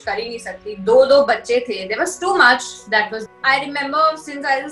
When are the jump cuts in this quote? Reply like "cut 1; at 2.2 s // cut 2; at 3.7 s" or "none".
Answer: cut 1; at 3.2 s